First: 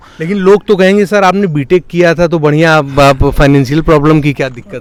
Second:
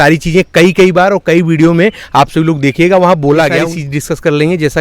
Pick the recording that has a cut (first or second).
second